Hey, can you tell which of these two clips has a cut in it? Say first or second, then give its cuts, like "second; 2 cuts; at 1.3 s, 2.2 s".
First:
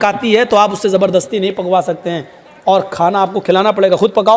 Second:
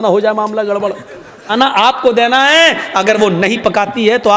second; 1 cut; at 1.5 s